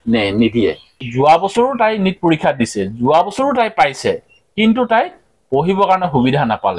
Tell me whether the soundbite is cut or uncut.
cut